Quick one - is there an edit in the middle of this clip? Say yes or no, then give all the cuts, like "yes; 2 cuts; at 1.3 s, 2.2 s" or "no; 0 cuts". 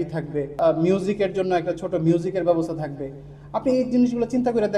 no; 0 cuts